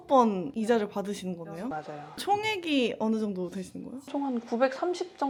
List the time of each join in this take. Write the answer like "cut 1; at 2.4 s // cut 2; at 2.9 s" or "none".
none